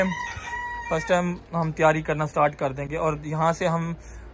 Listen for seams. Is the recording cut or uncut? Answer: uncut